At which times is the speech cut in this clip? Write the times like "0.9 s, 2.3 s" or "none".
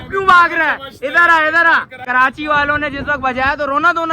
2.0 s